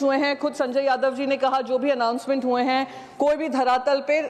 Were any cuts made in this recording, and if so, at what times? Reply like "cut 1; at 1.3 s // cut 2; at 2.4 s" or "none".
none